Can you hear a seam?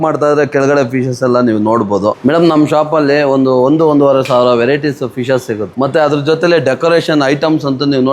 yes; 2 cuts; at 2.2 s, 5.7 s

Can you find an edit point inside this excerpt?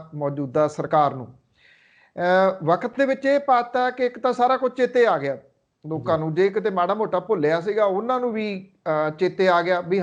no; 0 cuts

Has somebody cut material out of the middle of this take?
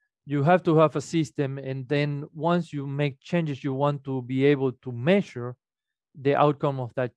no; 0 cuts

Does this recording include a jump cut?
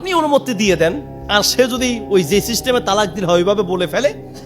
yes; 1 cut; at 1.1 s

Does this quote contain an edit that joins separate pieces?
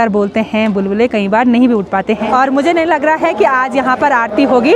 yes; 1 cut; at 2.2 s

